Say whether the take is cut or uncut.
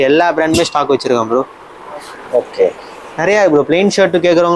uncut